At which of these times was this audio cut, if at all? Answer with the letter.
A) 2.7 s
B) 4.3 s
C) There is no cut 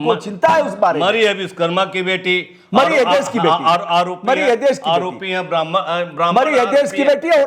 C